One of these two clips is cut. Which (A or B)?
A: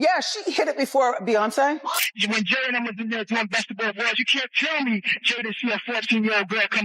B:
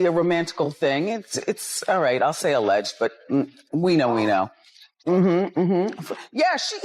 A